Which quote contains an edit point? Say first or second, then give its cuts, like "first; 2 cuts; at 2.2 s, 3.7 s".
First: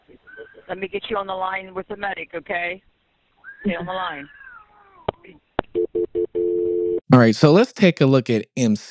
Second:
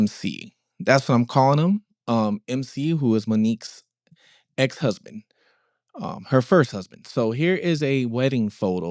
first; 1 cut; at 6.5 s